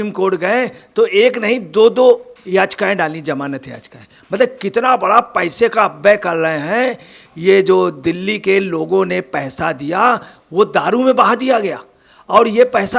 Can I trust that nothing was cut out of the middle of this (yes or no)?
yes